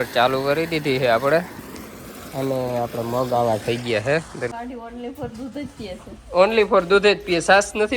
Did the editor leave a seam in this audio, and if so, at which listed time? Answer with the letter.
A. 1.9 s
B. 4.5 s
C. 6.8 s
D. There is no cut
B